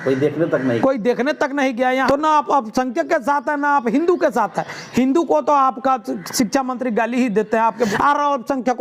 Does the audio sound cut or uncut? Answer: cut